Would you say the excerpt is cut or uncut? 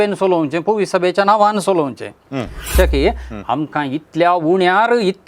cut